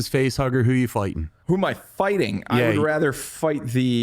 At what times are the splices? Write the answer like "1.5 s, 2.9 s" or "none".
1.3 s